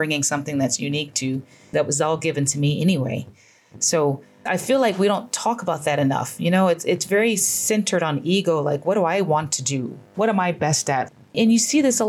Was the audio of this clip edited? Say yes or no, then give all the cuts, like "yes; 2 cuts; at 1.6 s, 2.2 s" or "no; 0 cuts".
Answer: yes; 2 cuts; at 1.7 s, 11.1 s